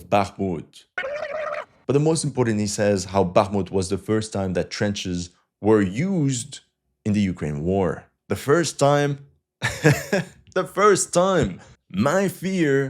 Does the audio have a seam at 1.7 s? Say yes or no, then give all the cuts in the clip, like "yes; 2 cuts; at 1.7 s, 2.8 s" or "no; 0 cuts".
yes; 3 cuts; at 1.7 s, 8.1 s, 11.6 s